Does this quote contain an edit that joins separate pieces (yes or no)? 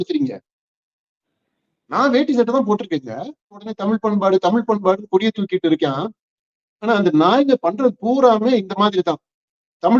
yes